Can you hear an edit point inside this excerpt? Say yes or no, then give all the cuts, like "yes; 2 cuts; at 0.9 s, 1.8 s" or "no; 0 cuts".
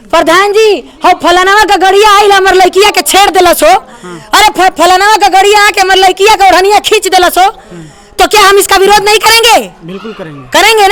no; 0 cuts